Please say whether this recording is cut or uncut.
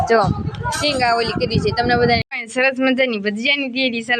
cut